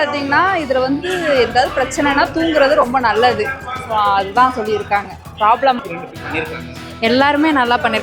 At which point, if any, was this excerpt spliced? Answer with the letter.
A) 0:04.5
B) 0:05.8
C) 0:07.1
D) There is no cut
B